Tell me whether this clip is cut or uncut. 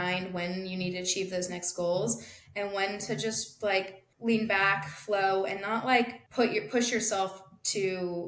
cut